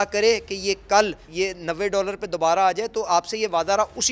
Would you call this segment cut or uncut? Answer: cut